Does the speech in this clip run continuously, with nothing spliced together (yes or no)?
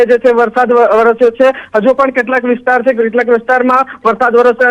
yes